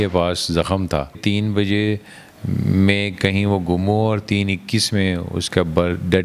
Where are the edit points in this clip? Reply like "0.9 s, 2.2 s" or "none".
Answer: 1.2 s

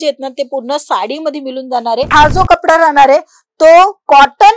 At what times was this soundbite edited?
2.1 s

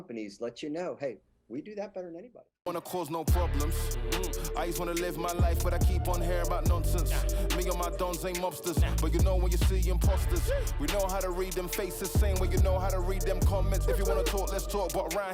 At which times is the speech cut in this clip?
2.4 s

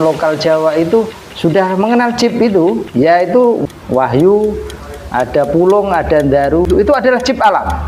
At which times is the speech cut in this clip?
1.2 s, 2.8 s, 3.6 s, 6.7 s

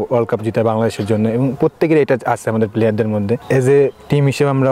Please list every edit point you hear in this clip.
3.4 s

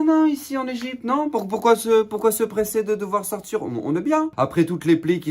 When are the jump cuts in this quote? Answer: 4.3 s

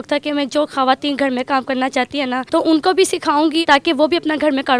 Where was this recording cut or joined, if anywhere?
2.4 s, 3.6 s

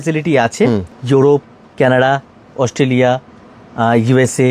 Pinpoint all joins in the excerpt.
0.9 s

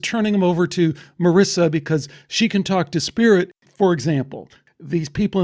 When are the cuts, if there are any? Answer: 3.5 s, 4.6 s

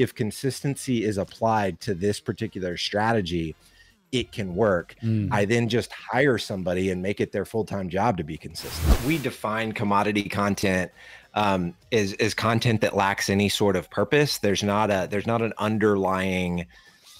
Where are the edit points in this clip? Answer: 8.9 s

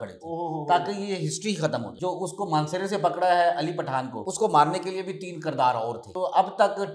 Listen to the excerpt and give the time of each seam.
1.9 s, 4.2 s, 6.0 s

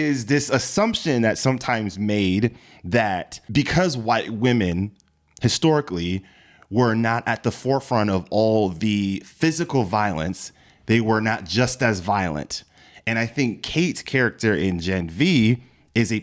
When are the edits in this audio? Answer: none

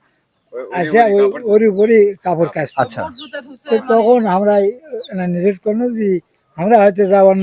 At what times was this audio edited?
none

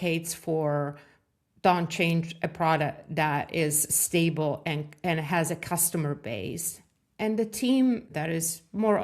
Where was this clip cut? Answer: 8.1 s

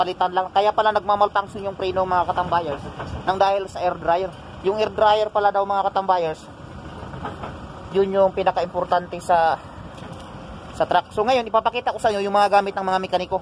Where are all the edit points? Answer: none

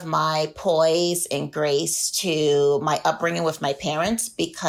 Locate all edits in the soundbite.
none

